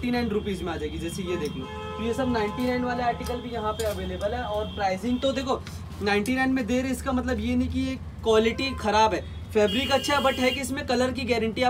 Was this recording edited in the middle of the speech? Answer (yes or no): no